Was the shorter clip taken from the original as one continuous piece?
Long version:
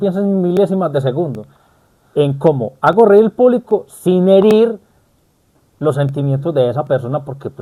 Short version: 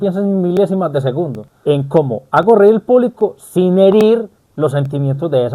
no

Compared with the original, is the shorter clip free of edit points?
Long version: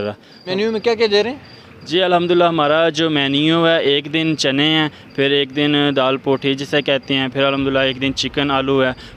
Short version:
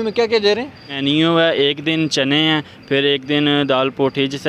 no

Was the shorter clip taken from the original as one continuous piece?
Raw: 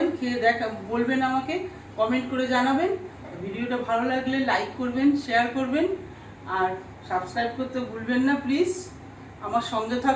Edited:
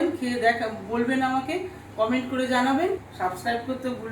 no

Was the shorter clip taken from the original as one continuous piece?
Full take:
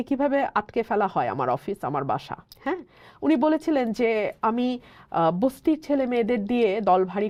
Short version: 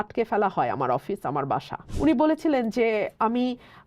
no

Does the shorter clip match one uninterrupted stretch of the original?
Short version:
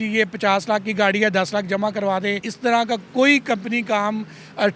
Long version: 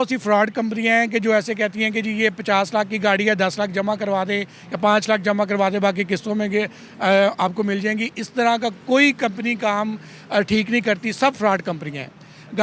no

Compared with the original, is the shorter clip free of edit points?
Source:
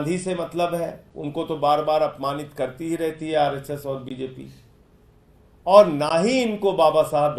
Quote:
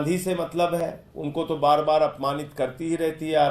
yes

